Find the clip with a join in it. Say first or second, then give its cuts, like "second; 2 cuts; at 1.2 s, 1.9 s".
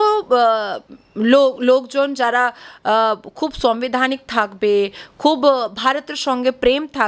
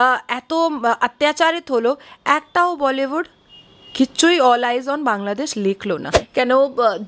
second; 1 cut; at 6.2 s